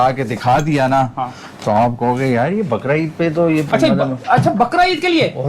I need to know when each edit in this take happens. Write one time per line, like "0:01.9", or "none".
none